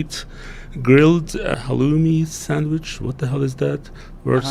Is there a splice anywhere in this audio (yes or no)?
yes